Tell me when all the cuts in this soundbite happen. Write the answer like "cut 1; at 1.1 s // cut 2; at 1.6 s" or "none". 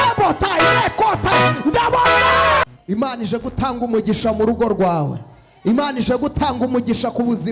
cut 1; at 2.6 s